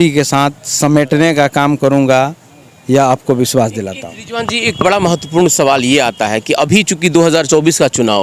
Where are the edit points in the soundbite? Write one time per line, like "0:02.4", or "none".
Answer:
none